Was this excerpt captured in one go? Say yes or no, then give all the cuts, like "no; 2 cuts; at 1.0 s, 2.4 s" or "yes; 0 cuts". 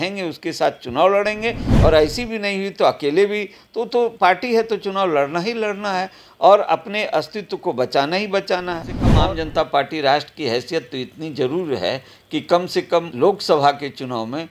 no; 2 cuts; at 9.0 s, 13.1 s